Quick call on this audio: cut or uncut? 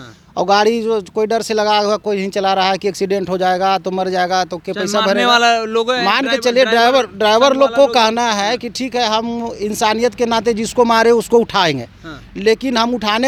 uncut